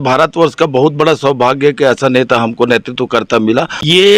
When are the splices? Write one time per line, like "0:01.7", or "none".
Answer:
0:03.2